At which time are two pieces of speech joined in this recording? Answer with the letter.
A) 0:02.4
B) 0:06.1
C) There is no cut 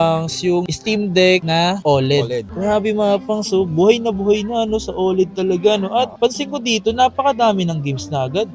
C